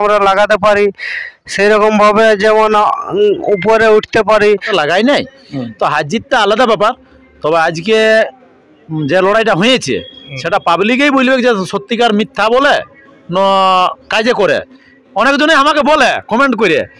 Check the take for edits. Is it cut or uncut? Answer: cut